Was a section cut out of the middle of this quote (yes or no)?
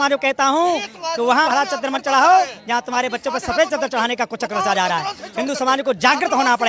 yes